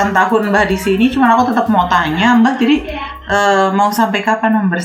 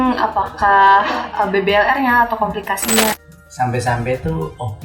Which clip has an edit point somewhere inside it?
second; 1 cut; at 3.1 s

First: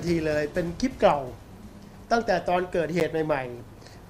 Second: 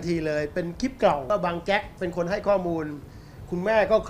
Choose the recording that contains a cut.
second; 1 cut; at 1.3 s

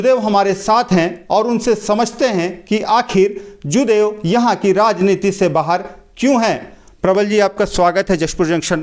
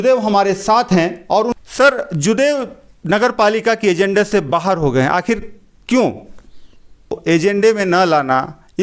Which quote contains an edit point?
second; 2 cuts; at 1.5 s, 7.2 s

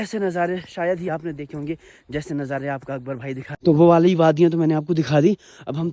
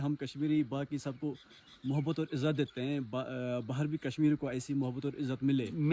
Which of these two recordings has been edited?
first; 1 cut; at 3.4 s

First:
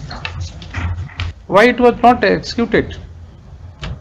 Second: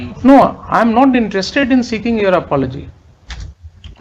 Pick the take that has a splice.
first; 1 cut; at 1.3 s

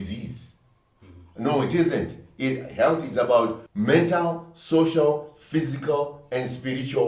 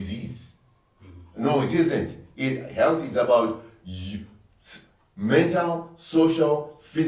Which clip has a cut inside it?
first; 1 cut; at 3.6 s

